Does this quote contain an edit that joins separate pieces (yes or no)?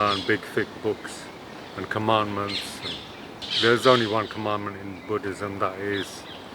yes